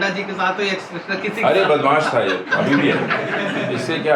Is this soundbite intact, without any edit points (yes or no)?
yes